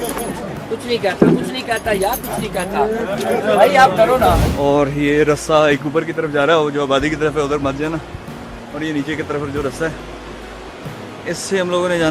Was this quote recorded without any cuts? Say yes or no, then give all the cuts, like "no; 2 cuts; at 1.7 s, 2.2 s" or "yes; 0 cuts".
no; 1 cut; at 4.5 s